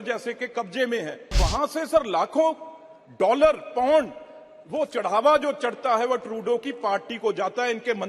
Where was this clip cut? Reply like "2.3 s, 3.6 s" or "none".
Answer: 1.3 s